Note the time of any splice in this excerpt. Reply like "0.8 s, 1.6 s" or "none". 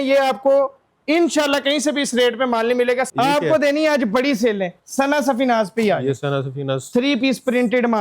3.1 s